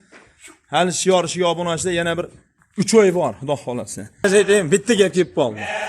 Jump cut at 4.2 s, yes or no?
yes